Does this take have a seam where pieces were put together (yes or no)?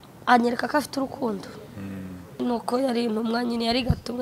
yes